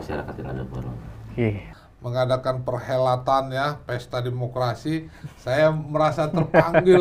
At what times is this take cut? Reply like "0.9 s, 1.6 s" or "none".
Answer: 1.6 s